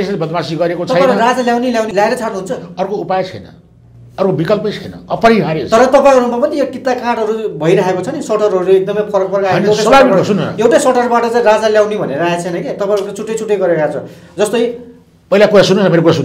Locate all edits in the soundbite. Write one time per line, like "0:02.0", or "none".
none